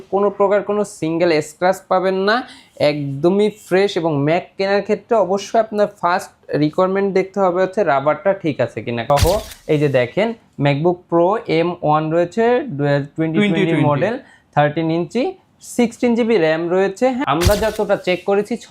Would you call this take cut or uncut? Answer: cut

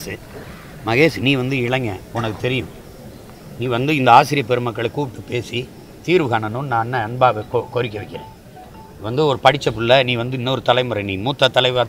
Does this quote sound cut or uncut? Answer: uncut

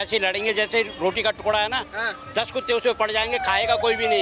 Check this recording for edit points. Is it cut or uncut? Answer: uncut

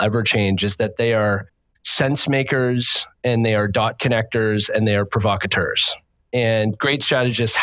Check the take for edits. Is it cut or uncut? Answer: uncut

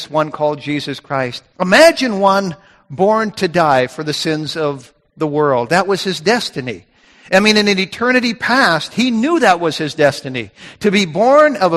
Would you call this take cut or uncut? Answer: cut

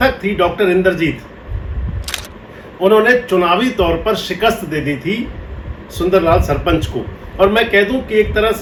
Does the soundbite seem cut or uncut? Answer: uncut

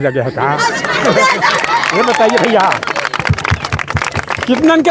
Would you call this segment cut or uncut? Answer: uncut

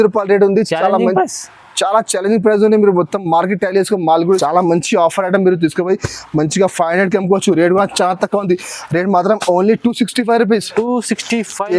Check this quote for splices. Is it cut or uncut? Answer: cut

